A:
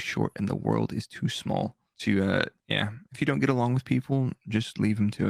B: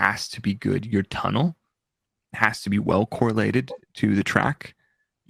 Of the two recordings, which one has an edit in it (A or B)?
A